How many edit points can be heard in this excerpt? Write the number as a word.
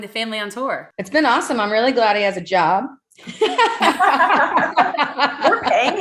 zero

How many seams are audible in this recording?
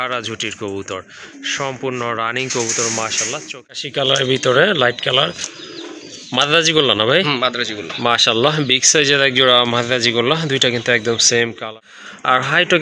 two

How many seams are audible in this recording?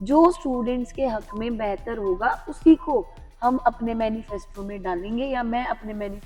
zero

